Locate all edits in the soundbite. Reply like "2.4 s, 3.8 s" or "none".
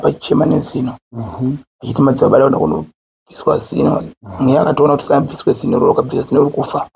none